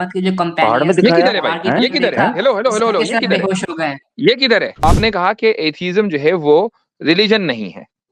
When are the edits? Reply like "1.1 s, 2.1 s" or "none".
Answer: 4.8 s